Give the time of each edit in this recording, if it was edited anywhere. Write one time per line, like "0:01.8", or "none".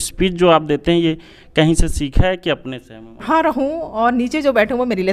0:03.2